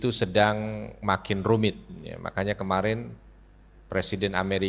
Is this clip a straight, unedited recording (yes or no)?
yes